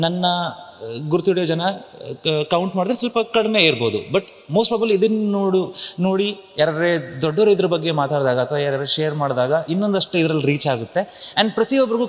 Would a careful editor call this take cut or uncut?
uncut